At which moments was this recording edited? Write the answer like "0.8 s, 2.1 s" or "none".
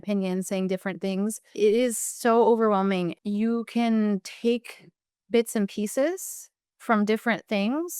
1.4 s, 3.2 s